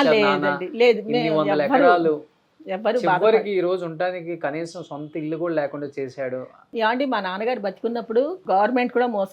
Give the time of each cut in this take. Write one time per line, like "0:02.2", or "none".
0:06.6
0:08.4